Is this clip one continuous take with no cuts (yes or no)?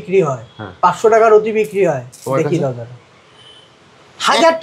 yes